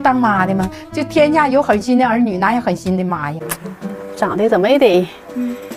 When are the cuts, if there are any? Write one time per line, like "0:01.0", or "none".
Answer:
0:03.3